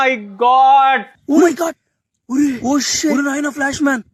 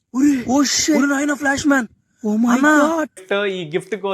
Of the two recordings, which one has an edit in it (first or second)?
second